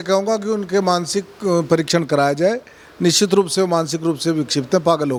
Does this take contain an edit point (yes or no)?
no